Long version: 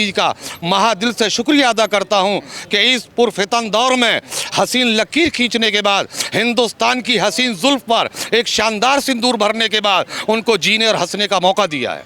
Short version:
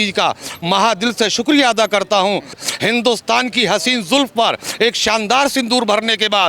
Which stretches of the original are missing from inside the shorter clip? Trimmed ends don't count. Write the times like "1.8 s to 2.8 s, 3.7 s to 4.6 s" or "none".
2.6 s to 6.2 s